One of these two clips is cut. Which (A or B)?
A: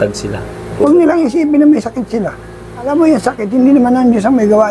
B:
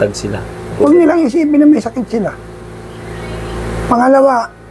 A